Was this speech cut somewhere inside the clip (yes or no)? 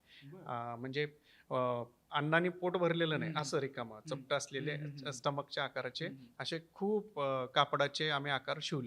no